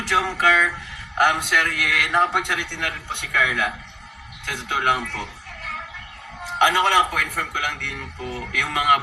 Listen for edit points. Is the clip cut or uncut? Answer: uncut